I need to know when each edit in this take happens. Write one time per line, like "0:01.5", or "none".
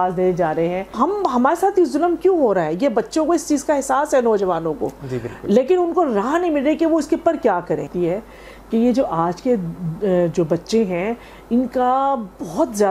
0:00.9
0:07.9